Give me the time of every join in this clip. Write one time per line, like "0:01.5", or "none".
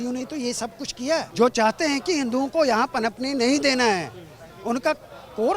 0:01.3

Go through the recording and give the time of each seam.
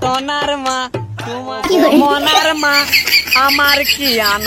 0:01.5

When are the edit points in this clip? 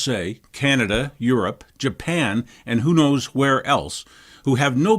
none

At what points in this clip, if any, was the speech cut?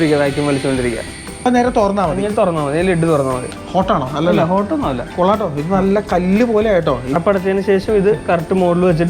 0:01.5
0:03.5
0:07.1

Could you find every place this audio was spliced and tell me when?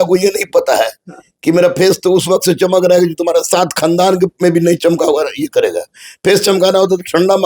none

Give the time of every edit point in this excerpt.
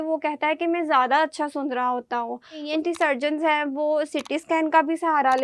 0:02.6

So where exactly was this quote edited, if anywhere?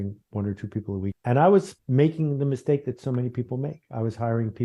0:01.2
0:01.8

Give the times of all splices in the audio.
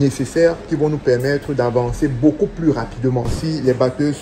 0:03.3

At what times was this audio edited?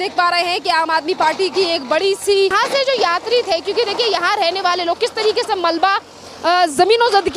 0:02.5

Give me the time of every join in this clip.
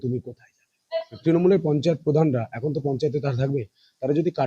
0:01.1

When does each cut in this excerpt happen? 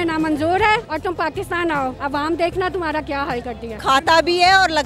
0:00.9
0:02.0
0:03.7

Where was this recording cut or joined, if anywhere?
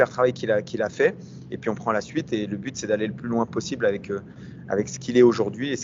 none

